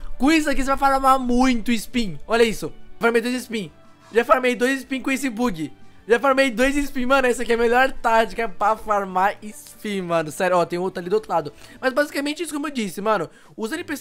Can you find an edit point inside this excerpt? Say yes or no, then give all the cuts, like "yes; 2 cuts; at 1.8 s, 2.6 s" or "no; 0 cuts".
no; 0 cuts